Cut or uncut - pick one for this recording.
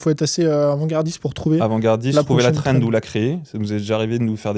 uncut